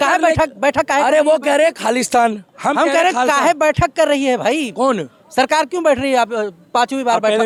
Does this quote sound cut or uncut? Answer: uncut